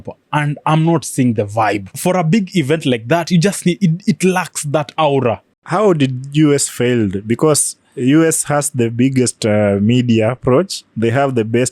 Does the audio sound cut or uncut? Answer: cut